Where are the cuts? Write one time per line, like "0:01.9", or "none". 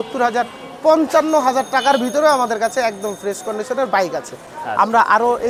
none